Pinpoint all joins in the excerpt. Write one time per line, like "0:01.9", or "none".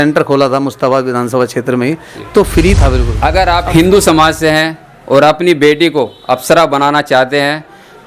0:03.1